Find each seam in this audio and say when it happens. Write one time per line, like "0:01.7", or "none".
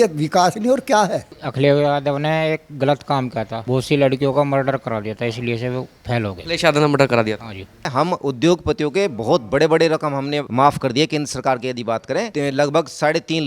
0:01.4
0:07.9